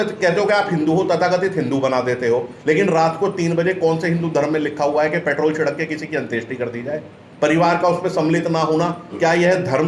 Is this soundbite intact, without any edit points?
yes; 0 cuts

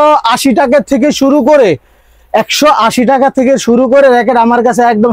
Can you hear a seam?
no; 0 cuts

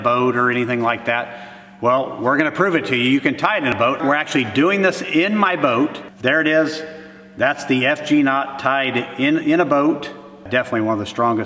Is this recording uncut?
no; 3 cuts; at 3.8 s, 6.1 s, 10.5 s

